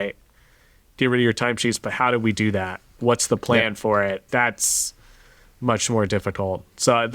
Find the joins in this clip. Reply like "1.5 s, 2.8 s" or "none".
3.0 s, 4.3 s

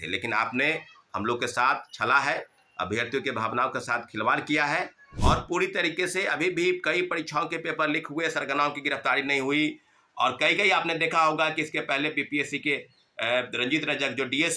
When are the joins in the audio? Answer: 5.0 s

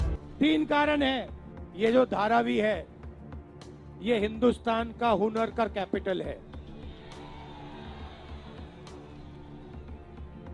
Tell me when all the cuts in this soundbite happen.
1.6 s, 6.4 s, 8.1 s

